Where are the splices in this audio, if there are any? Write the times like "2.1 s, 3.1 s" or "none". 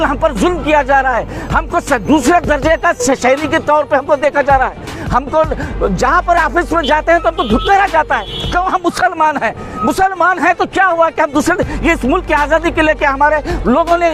none